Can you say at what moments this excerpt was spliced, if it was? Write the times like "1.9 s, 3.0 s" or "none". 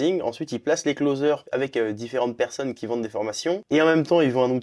1.4 s, 3.6 s